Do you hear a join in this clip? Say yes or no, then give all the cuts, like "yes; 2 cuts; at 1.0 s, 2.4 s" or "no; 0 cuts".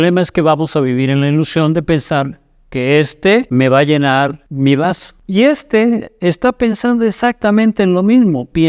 yes; 3 cuts; at 3.5 s, 4.4 s, 5.1 s